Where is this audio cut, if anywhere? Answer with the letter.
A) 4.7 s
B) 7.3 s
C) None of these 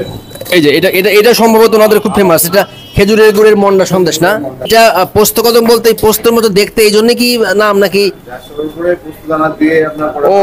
A